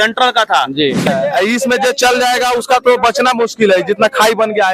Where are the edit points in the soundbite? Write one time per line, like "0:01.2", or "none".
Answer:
0:01.1